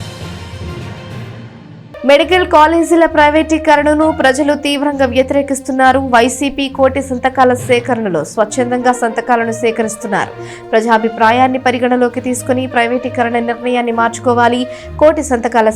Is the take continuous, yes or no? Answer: no